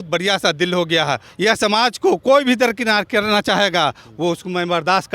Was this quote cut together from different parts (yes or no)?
yes